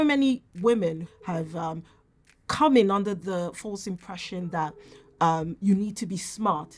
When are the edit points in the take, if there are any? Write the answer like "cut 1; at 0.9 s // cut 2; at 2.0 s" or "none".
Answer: cut 1; at 1.0 s